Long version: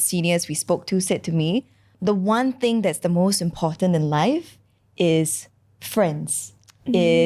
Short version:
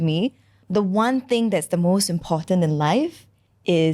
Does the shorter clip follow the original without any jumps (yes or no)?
yes